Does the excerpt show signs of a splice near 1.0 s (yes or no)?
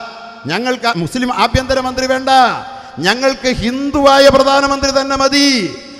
yes